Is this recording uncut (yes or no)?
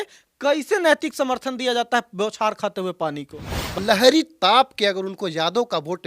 no